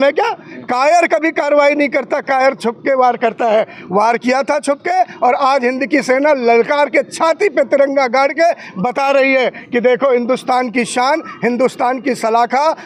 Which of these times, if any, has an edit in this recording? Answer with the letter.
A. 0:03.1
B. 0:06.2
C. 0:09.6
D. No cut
D